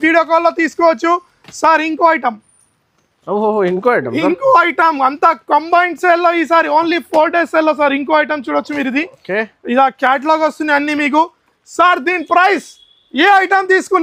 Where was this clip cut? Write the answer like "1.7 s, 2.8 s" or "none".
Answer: none